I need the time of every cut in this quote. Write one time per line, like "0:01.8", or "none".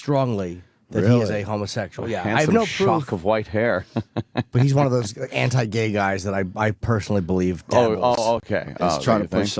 0:07.0